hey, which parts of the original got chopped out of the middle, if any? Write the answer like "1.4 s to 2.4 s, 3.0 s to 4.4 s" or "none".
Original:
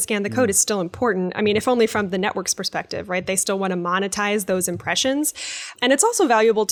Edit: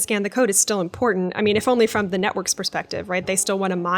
none